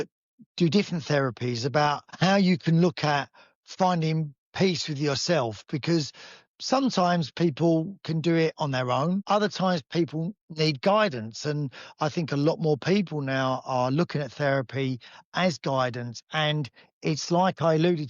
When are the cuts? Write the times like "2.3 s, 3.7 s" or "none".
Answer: 9.2 s